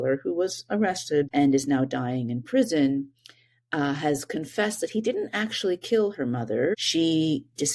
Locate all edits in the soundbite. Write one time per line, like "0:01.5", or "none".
0:01.3
0:06.7